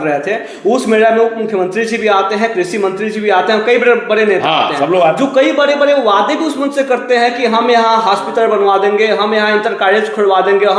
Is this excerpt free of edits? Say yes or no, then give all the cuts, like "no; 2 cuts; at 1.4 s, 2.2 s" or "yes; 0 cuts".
yes; 0 cuts